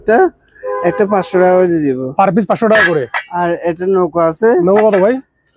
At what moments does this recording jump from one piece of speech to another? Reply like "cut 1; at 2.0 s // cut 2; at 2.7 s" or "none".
none